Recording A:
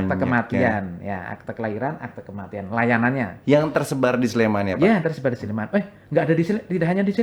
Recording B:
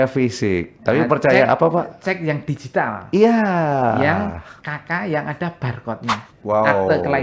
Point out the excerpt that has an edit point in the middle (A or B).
B